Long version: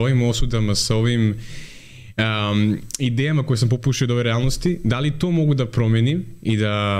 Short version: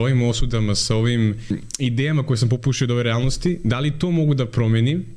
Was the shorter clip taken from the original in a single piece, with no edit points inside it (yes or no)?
no